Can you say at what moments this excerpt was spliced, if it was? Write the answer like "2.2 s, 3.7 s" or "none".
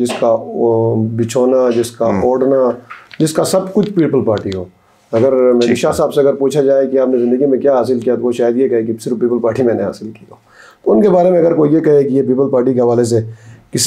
none